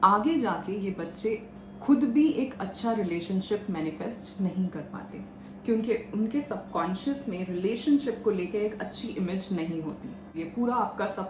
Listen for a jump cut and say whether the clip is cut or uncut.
cut